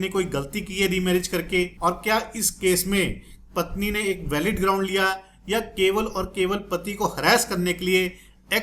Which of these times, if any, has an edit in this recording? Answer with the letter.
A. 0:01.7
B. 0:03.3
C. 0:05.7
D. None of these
A